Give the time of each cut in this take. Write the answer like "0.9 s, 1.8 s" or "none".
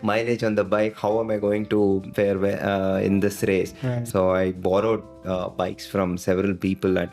2.1 s, 4.0 s, 5.1 s